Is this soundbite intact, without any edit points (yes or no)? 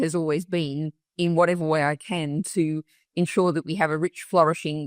yes